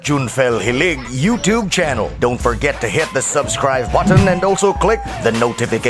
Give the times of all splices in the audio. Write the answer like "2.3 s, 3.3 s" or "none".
none